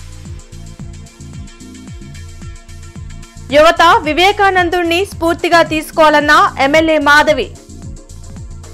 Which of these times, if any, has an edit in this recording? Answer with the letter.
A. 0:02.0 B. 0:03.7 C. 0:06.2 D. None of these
A